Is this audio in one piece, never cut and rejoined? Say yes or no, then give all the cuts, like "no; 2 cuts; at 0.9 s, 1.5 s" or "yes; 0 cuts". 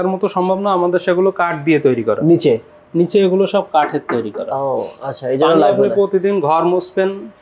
yes; 0 cuts